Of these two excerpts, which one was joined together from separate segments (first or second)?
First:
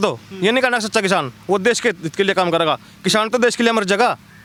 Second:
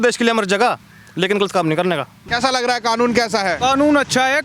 second